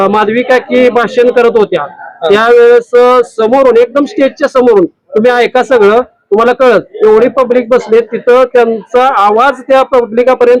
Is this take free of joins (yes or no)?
yes